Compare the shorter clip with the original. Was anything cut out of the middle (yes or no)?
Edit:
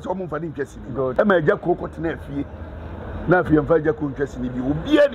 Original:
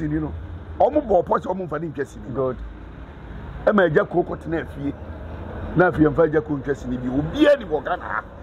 yes